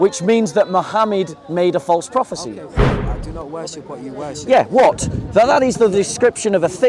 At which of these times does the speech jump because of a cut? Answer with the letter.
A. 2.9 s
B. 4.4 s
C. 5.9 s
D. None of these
A